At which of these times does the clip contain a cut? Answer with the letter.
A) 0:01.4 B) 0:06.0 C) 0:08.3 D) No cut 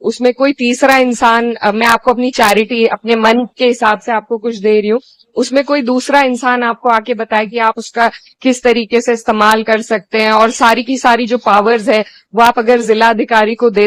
D